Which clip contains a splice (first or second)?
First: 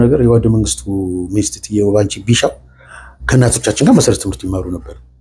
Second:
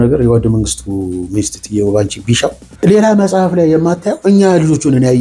second